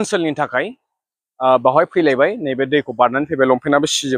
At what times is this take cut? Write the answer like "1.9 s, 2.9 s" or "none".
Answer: none